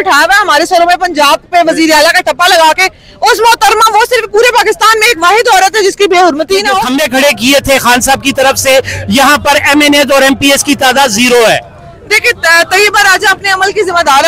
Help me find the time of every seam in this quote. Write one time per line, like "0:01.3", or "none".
0:06.8